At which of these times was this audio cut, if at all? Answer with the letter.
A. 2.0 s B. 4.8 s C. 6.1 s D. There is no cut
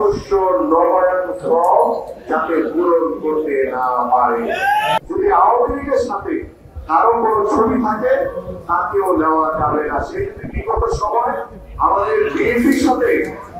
B